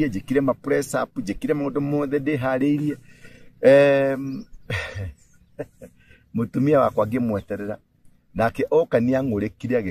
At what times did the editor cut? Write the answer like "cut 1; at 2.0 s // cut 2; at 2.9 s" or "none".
none